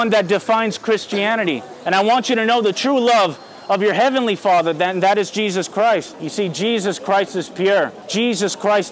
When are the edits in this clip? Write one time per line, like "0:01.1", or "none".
0:01.7
0:06.2
0:08.0